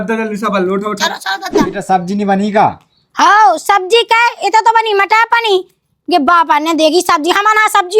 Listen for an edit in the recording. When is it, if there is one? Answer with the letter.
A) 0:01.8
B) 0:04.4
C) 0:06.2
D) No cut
A